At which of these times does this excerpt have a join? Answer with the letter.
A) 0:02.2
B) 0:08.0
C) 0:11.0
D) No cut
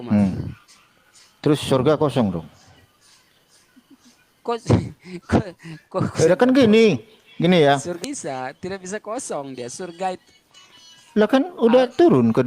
B